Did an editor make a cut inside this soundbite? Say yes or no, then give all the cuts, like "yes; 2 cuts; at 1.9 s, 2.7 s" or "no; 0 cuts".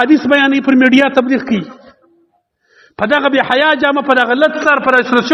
no; 0 cuts